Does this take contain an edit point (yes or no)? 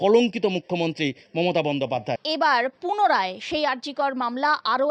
no